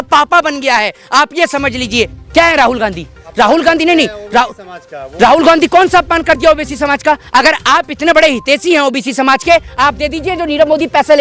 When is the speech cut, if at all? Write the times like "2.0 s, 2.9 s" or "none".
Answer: 2.2 s